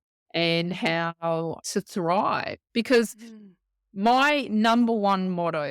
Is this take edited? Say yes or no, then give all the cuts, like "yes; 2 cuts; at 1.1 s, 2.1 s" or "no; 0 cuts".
yes; 2 cuts; at 1.6 s, 2.6 s